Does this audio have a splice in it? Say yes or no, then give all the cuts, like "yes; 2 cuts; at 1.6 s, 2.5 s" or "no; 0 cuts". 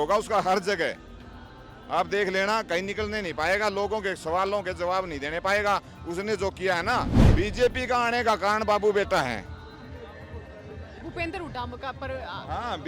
yes; 1 cut; at 7.2 s